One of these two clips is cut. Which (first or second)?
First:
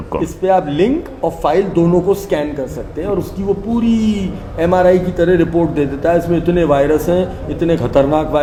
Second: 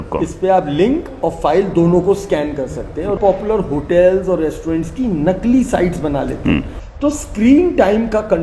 second